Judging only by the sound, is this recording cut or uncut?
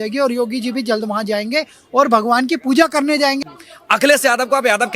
cut